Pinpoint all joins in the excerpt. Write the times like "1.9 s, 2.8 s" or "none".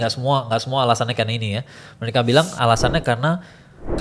none